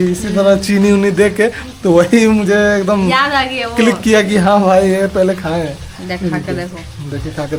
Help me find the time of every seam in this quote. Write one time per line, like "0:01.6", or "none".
none